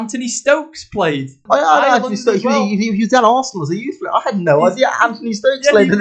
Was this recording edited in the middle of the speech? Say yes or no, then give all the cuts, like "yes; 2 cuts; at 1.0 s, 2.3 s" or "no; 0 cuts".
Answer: yes; 1 cut; at 1.4 s